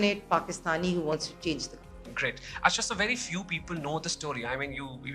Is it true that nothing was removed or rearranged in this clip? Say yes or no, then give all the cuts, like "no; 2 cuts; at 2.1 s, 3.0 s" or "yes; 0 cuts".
yes; 0 cuts